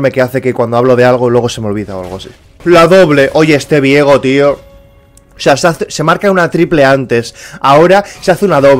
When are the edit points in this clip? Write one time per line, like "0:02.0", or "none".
0:02.6